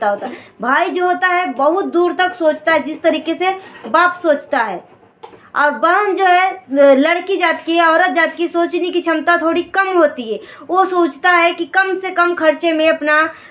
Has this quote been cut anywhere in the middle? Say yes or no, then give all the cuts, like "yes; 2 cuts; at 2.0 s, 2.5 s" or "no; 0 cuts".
no; 0 cuts